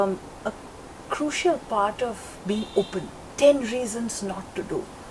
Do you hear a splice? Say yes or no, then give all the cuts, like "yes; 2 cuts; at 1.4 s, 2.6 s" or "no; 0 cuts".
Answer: yes; 1 cut; at 3.3 s